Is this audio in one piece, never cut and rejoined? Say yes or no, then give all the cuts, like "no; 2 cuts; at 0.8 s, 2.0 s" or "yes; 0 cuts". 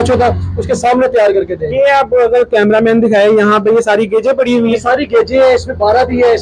yes; 0 cuts